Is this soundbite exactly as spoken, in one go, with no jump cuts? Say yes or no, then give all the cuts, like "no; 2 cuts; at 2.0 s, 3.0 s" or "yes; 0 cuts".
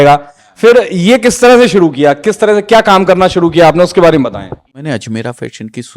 no; 1 cut; at 4.8 s